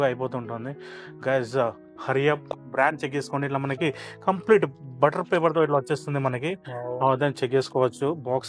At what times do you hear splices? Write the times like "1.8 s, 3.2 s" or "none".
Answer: 2.6 s